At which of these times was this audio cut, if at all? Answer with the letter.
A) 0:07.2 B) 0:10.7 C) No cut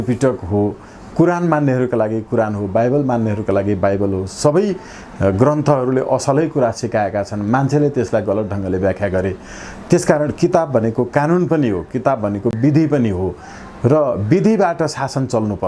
C